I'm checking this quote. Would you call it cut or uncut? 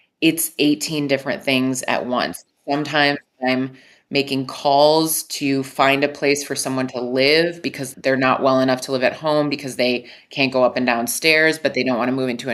cut